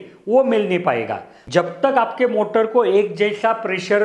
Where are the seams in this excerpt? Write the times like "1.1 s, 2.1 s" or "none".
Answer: 1.6 s